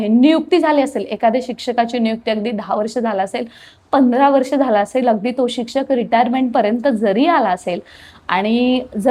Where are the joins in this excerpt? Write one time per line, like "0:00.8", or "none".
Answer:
none

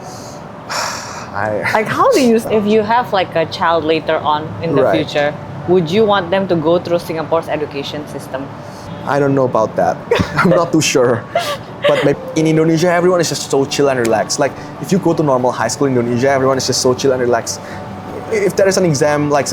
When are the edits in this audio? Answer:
0:02.4
0:08.9
0:12.1

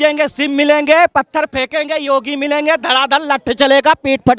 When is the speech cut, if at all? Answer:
none

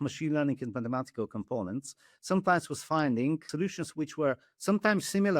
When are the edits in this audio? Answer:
0:03.5

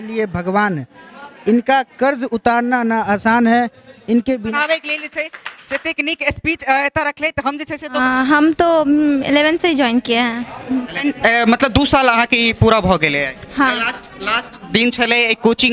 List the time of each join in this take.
0:04.5
0:08.0

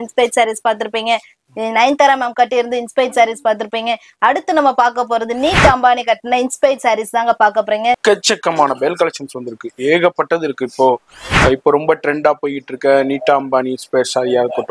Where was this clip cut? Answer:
0:08.0

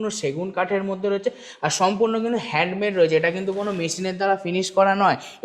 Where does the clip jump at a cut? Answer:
none

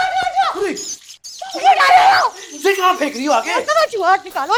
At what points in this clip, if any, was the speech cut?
none

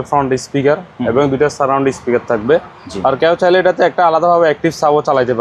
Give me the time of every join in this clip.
none

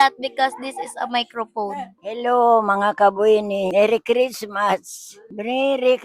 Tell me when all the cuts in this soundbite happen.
0:01.9
0:03.7

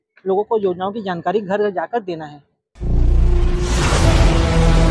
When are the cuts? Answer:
0:02.9

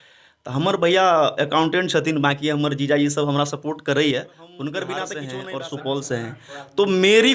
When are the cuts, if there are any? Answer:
0:05.1

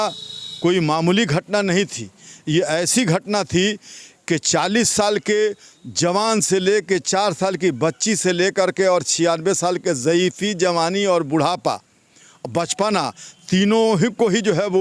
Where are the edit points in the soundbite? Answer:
none

